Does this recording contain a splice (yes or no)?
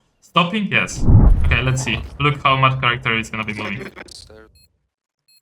yes